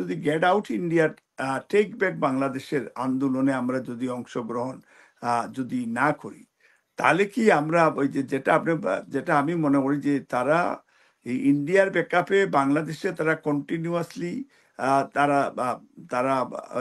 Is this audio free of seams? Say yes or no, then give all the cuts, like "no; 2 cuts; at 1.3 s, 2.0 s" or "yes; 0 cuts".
yes; 0 cuts